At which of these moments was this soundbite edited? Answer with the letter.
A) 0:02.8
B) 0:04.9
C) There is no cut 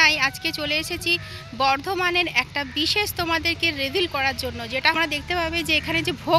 B